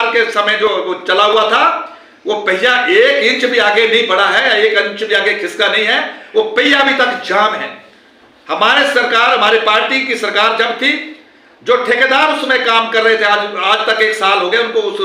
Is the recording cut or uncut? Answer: uncut